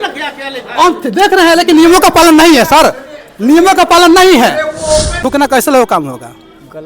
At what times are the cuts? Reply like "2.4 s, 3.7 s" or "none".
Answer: 5.2 s